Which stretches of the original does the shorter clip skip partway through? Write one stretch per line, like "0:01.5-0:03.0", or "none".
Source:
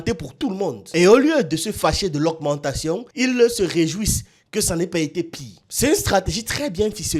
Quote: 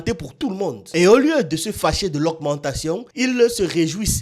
none